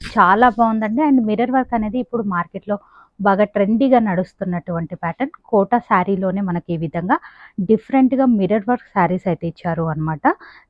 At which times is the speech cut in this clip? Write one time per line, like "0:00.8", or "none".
none